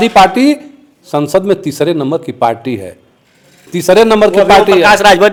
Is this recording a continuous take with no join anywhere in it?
yes; 0 cuts

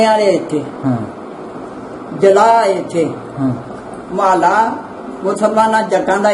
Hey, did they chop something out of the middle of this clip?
no; 0 cuts

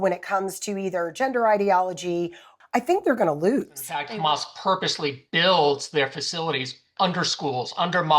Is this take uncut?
no; 2 cuts; at 2.5 s, 4.1 s

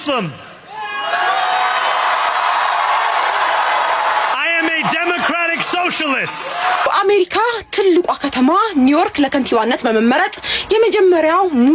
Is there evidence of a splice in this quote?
no; 0 cuts

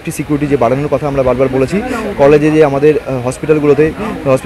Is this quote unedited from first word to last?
yes; 0 cuts

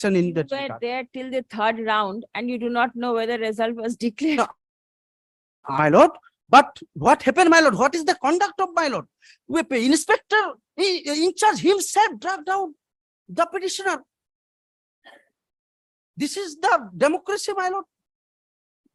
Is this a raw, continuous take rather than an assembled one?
yes; 0 cuts

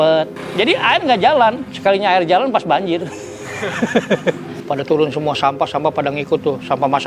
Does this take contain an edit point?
yes; 1 cut; at 4.6 s

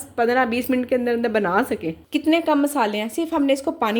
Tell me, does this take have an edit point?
yes; 1 cut; at 2.0 s

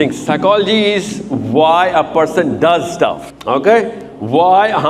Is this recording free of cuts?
no; 1 cut; at 3.3 s

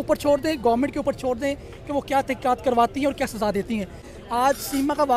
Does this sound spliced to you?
no; 0 cuts

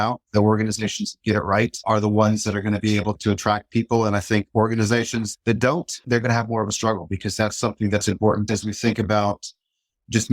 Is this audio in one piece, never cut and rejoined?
no; 1 cut; at 8.4 s

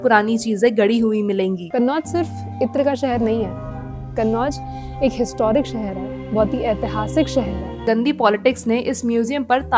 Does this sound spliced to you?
yes; 2 cuts; at 1.6 s, 7.8 s

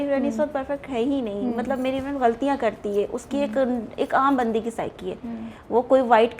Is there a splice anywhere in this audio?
no; 0 cuts

